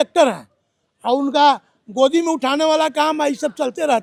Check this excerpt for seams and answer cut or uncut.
uncut